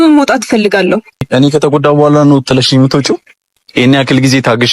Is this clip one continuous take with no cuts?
no; 1 cut; at 1.3 s

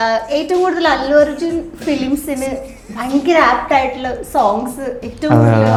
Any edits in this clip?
no; 0 cuts

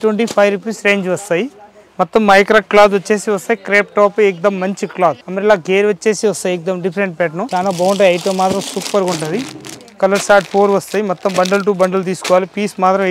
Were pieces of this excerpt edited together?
no; 0 cuts

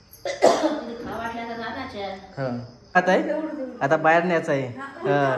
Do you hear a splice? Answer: yes; 1 cut; at 3.0 s

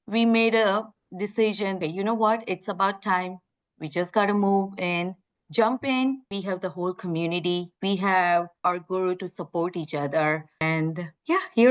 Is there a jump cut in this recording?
yes; 4 cuts; at 1.8 s, 6.3 s, 8.6 s, 10.6 s

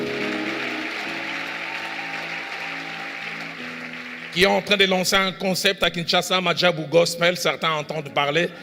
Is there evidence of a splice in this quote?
no; 0 cuts

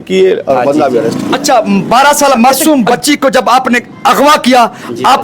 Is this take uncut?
no; 1 cut; at 1.2 s

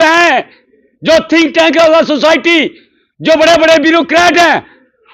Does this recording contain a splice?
no; 0 cuts

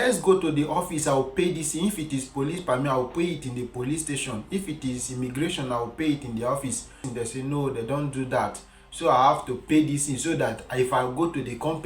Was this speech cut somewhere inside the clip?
yes; 1 cut; at 7.0 s

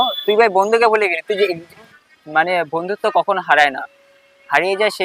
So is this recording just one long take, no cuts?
no; 1 cut; at 2.0 s

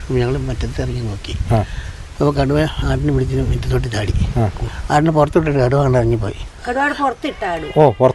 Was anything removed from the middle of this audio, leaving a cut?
yes; 2 cuts; at 4.7 s, 6.6 s

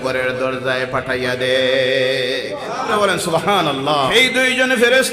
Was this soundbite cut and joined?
yes; 2 cuts; at 2.9 s, 4.1 s

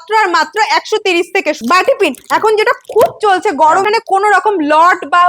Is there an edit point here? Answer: yes; 2 cuts; at 1.6 s, 3.8 s

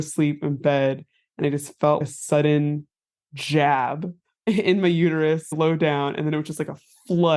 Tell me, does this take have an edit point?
no; 0 cuts

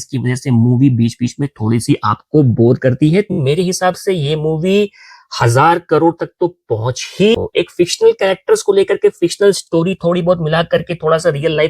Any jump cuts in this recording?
yes; 2 cuts; at 3.4 s, 7.3 s

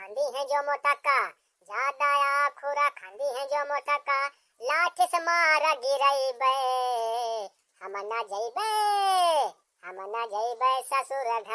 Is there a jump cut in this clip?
no; 0 cuts

